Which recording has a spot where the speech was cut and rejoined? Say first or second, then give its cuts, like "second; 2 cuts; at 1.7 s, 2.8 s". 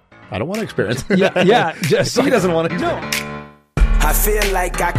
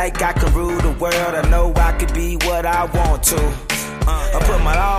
first; 1 cut; at 2.9 s